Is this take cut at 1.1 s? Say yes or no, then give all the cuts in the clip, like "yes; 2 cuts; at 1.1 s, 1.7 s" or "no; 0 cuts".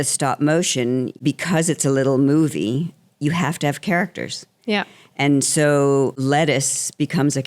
yes; 2 cuts; at 1.1 s, 6.2 s